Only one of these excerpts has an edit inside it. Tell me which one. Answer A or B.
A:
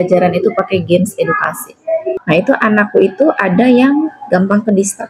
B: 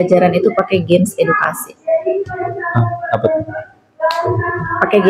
A